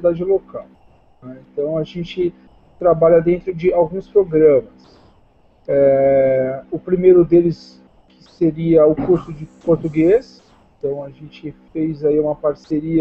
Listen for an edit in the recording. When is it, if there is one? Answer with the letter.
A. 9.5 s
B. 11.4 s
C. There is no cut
C